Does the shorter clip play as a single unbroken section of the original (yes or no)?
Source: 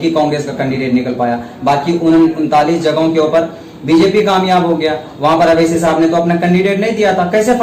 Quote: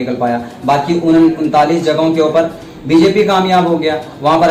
yes